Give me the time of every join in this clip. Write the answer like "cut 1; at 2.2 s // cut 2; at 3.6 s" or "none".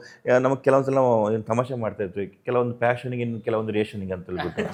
none